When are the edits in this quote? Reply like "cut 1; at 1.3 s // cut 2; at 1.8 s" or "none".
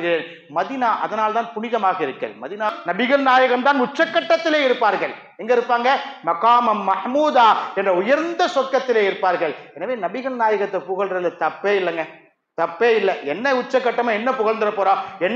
cut 1; at 2.7 s